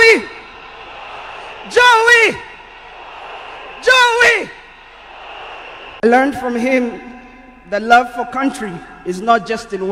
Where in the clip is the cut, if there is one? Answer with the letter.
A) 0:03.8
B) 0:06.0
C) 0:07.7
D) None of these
B